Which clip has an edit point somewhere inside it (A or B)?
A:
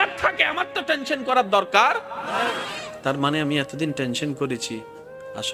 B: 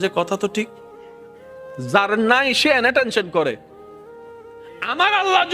B